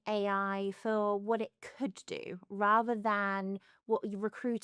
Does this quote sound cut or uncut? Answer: uncut